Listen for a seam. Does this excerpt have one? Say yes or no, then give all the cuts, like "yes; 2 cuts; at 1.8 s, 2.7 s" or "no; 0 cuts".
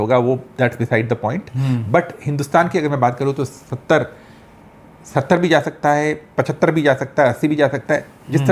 no; 0 cuts